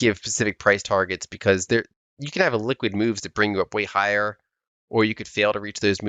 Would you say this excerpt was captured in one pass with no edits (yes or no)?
yes